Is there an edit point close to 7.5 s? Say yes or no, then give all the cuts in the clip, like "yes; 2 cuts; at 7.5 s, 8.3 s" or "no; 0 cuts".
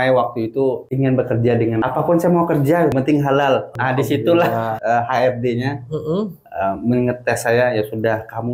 no; 5 cuts; at 0.9 s, 1.8 s, 2.9 s, 3.7 s, 4.7 s